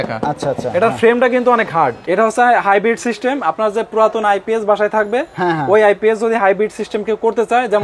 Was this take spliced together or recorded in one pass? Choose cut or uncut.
cut